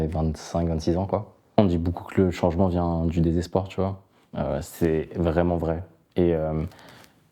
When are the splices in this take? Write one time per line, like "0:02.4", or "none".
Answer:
0:01.6